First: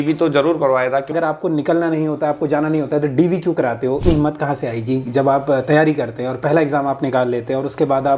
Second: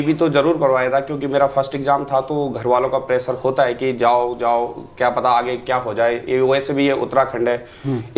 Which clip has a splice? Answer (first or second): first